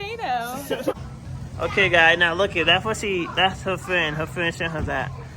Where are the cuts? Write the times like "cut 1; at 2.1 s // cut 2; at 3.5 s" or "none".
cut 1; at 0.9 s